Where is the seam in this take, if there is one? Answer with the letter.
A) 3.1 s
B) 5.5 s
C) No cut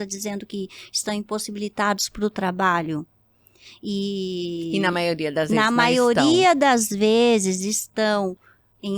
C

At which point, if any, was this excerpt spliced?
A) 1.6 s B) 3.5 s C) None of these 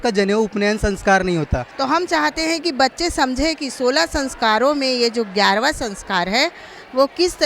A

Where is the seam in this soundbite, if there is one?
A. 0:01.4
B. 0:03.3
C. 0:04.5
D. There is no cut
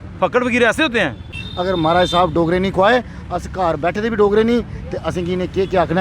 A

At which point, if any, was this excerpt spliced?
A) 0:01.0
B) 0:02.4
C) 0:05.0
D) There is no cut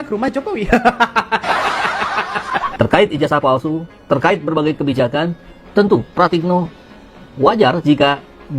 B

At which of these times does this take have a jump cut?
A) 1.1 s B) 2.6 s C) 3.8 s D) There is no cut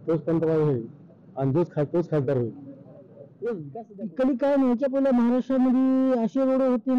C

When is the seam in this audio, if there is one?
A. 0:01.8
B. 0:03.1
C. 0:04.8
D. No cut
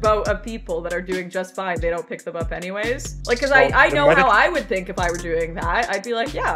B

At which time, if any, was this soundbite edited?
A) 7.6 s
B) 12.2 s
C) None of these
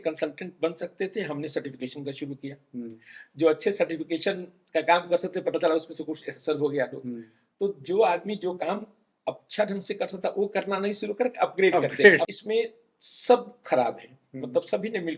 B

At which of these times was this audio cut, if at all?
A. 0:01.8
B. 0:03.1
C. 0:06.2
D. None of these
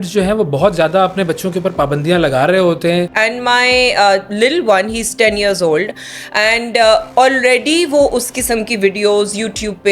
B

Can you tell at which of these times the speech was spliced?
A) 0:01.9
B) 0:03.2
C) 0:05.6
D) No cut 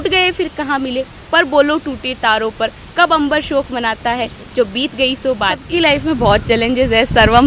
C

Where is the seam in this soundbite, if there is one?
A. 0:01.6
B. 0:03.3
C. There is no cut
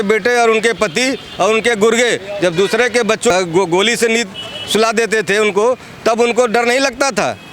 B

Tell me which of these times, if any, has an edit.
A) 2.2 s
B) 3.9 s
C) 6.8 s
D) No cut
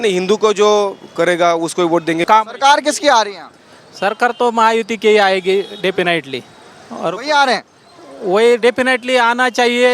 A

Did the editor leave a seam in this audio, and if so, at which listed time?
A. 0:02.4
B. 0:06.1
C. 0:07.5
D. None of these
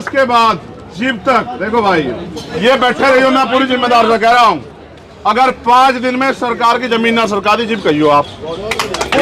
A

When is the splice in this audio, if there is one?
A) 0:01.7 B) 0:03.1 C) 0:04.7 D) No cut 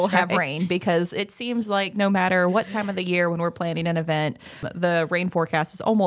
C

